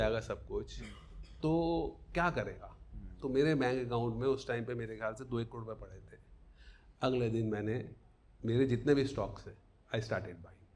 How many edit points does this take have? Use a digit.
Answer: 0